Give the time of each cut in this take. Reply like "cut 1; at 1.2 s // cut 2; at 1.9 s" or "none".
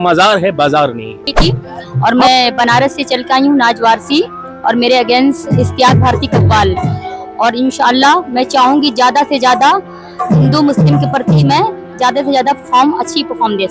cut 1; at 1.3 s